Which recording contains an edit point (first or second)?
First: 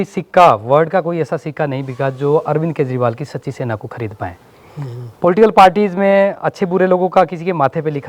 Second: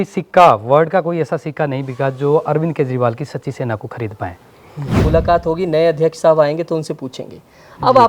second